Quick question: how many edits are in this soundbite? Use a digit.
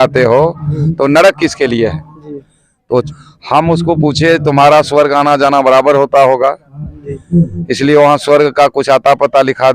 1